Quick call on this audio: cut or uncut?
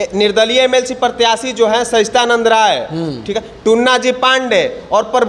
uncut